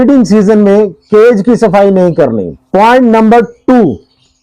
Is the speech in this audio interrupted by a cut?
yes; 1 cut; at 2.5 s

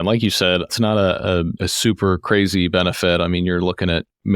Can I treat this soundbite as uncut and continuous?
yes; 0 cuts

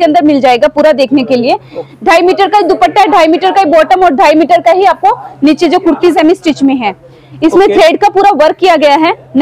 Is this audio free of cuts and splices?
no; 2 cuts; at 1.8 s, 6.1 s

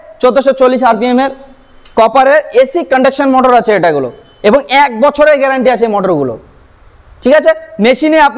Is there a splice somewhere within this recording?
no; 0 cuts

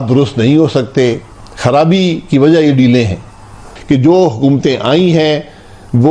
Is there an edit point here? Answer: yes; 1 cut; at 3.7 s

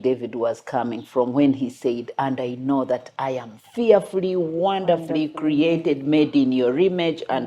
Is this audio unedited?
yes; 0 cuts

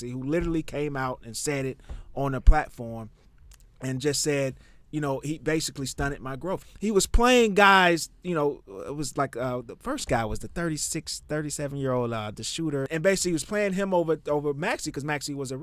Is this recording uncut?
no; 2 cuts; at 6.6 s, 12.9 s

